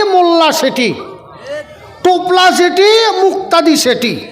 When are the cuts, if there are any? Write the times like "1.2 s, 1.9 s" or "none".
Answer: none